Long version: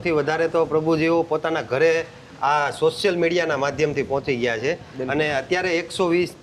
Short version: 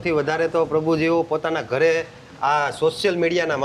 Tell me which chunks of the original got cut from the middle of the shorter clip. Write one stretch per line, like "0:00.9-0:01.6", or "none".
none